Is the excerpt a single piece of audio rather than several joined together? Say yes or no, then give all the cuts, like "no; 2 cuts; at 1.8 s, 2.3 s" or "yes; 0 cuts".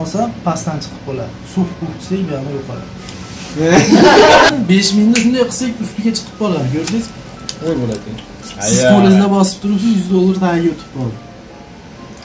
no; 1 cut; at 4.5 s